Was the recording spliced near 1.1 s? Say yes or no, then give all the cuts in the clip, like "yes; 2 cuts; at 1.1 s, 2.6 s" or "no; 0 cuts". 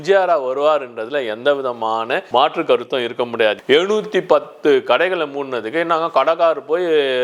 no; 1 cut; at 3.6 s